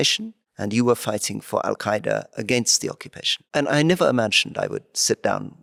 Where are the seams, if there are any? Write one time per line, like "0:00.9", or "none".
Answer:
none